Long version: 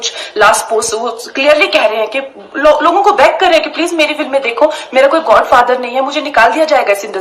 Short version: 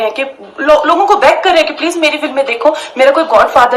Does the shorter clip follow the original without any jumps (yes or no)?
yes